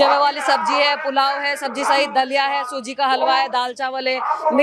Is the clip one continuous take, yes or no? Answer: yes